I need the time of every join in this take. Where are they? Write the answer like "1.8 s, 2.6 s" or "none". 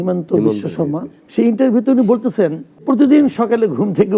1.2 s, 2.8 s